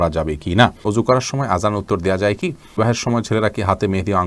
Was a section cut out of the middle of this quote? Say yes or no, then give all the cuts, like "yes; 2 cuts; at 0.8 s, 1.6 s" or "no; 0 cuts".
yes; 2 cuts; at 0.8 s, 2.8 s